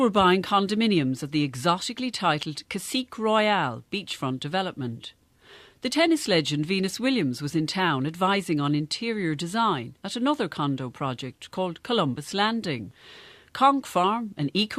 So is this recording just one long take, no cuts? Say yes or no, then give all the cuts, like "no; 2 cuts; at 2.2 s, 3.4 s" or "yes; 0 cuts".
no; 1 cut; at 8.4 s